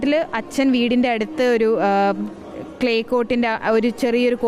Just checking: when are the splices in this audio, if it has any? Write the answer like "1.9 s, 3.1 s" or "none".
none